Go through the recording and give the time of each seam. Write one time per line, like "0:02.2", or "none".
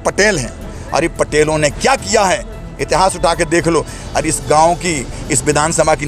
none

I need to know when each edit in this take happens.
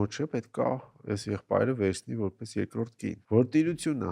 0:03.2

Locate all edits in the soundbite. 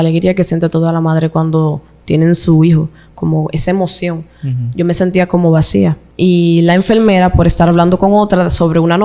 0:06.0

